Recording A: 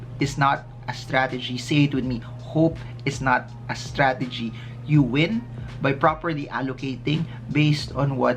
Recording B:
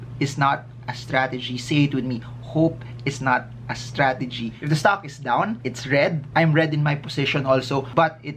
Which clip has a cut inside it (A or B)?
B